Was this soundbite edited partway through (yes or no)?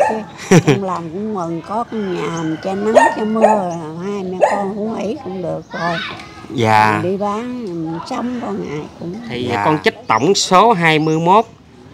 yes